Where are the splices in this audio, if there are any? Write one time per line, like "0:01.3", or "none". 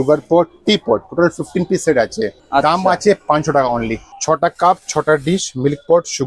0:02.4
0:04.1